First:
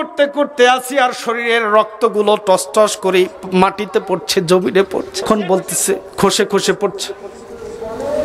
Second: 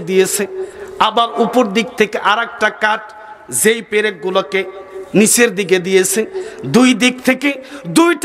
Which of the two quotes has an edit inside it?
first; 1 cut; at 5.2 s

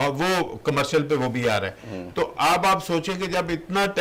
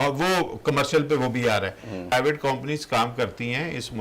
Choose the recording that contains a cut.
second; 1 cut; at 2.1 s

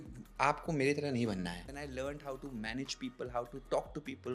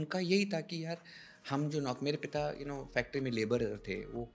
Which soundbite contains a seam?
first; 1 cut; at 1.7 s

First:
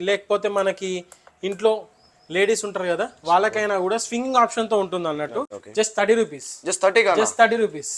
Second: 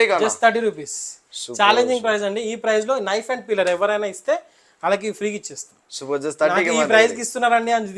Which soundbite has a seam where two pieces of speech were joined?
first; 1 cut; at 5.6 s

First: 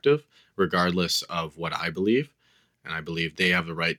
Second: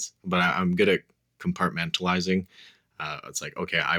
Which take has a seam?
first; 1 cut; at 3.1 s

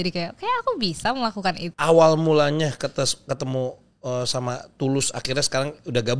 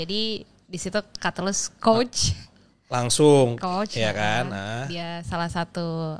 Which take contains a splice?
first; 1 cut; at 1.7 s

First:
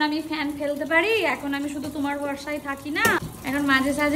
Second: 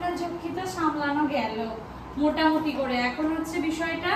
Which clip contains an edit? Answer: first; 1 cut; at 3.2 s

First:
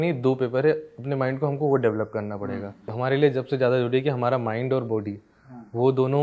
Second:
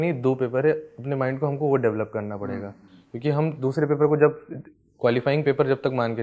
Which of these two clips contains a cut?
first; 1 cut; at 2.9 s

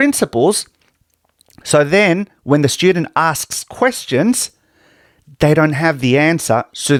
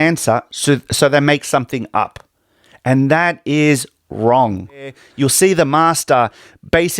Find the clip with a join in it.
second; 1 cut; at 5.1 s

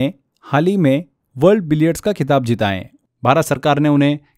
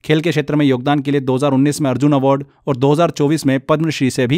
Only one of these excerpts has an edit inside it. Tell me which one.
first; 1 cut; at 2.9 s

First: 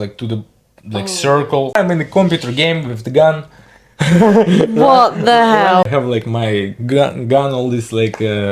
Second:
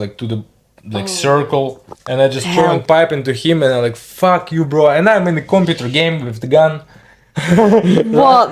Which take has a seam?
first; 2 cuts; at 1.8 s, 5.8 s

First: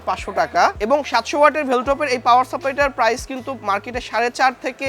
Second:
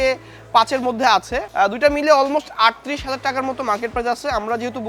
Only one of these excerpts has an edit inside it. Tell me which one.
second; 1 cut; at 1.5 s

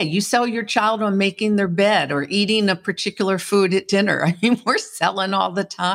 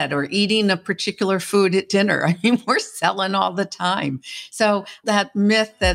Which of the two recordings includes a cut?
second; 1 cut; at 5.0 s

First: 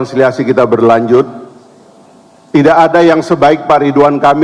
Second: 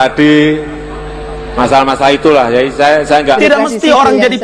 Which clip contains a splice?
second; 1 cut; at 3.4 s

